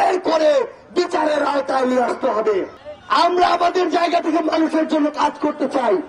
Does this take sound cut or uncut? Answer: cut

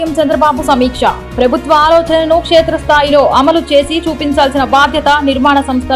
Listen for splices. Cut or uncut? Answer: uncut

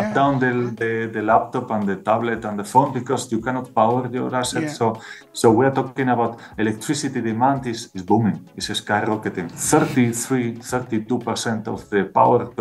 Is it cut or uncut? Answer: cut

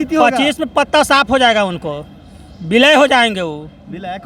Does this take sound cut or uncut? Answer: uncut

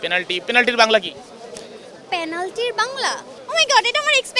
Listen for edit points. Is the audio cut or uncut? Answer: cut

